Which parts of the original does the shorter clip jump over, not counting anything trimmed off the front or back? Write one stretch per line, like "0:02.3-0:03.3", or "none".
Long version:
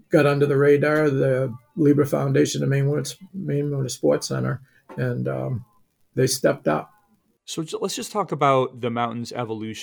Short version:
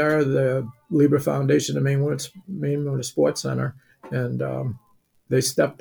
none